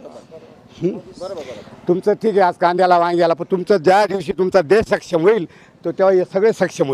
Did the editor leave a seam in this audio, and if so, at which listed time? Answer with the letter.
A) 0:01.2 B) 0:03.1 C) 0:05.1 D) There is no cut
D